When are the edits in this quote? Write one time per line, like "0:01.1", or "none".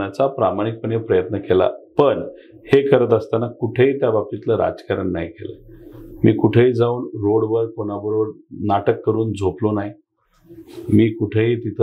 none